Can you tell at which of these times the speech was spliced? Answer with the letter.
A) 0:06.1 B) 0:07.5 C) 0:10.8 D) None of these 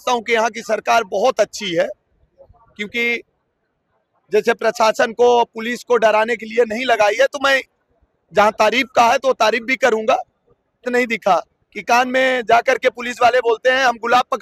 C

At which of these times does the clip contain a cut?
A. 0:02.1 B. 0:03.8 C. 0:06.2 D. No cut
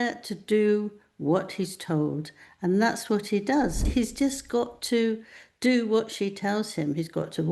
B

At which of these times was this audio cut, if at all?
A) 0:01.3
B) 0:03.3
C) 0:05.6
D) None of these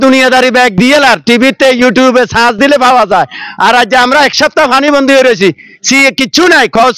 D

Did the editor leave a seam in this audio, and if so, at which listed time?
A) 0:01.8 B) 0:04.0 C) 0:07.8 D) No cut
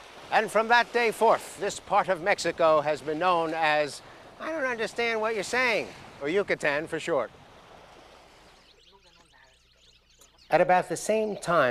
C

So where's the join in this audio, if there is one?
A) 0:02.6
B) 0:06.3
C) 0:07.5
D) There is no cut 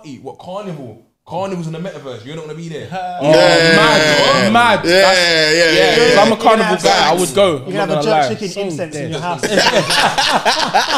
D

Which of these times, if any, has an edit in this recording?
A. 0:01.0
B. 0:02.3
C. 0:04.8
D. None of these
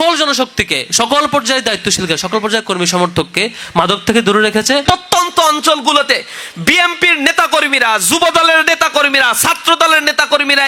C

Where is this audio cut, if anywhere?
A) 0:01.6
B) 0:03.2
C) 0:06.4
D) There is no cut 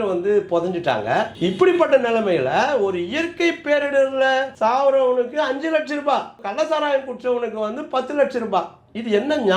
C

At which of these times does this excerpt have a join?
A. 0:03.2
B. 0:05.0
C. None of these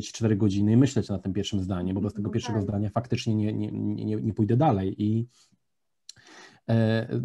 C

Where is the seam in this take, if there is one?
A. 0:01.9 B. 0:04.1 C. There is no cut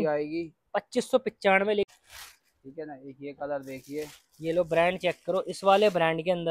A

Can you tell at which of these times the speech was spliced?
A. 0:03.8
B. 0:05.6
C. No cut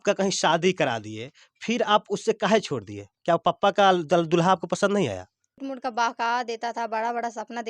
B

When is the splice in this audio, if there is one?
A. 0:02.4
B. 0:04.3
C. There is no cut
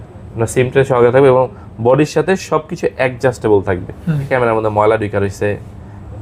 B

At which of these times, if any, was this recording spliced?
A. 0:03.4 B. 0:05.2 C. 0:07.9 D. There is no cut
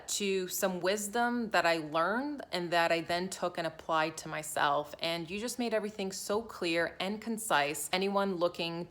C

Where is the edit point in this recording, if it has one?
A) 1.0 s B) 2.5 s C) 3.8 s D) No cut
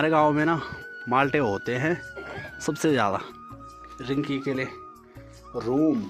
C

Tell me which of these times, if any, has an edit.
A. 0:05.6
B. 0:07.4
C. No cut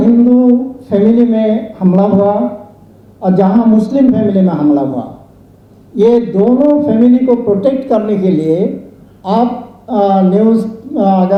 C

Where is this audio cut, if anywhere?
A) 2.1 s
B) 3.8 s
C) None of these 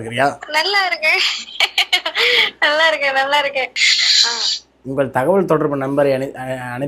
B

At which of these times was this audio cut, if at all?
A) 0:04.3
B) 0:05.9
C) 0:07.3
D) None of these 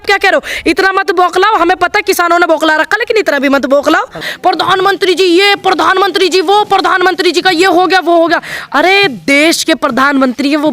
A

